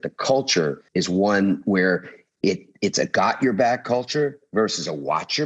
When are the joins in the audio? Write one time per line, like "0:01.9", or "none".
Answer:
0:00.8
0:02.7
0:04.4